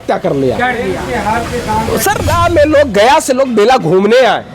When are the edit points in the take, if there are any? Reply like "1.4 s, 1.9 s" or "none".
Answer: 2.3 s